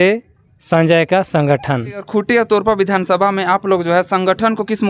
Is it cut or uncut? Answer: cut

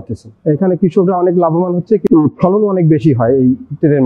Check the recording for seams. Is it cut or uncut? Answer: uncut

